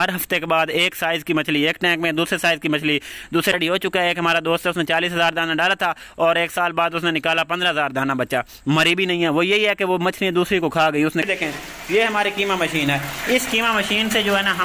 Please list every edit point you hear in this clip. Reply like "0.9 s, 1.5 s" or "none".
3.5 s, 11.3 s

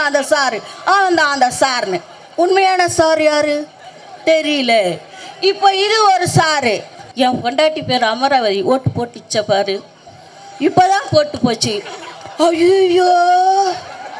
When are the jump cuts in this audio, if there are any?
7.0 s

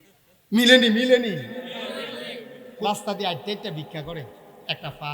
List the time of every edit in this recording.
2.7 s

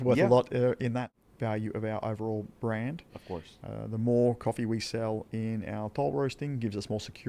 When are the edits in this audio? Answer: 1.1 s

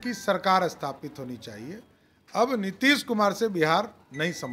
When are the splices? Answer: none

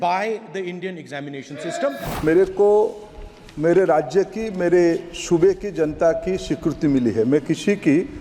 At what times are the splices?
2.1 s

